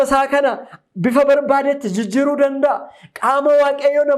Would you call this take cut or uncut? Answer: uncut